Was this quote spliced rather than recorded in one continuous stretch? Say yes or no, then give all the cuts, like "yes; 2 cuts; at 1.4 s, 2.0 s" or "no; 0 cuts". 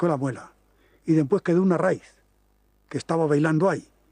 yes; 1 cut; at 1.9 s